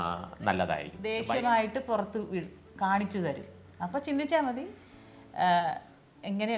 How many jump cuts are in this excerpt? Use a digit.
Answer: 1